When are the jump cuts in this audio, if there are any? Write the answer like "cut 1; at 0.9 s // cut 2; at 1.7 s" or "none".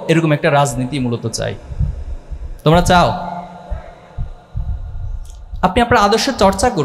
none